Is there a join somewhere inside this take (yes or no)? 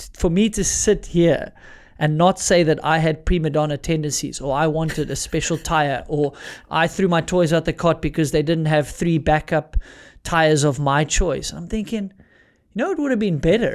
no